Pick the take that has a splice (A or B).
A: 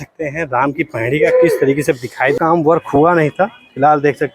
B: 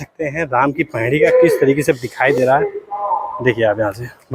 A